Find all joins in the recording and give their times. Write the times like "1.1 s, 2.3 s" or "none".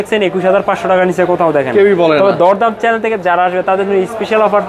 none

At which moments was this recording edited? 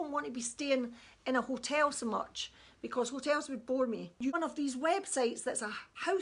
4.3 s

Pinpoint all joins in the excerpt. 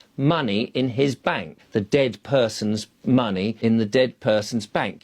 1.5 s, 3.5 s

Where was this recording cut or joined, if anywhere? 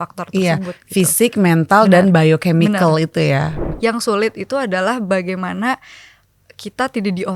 3.6 s

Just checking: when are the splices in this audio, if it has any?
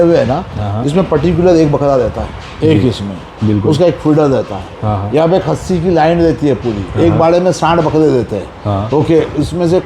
none

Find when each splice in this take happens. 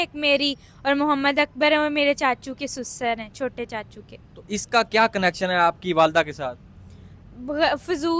none

